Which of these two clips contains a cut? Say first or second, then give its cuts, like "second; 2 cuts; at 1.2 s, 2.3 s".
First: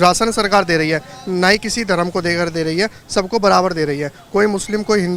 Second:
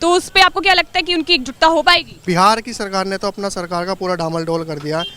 second; 1 cut; at 2.2 s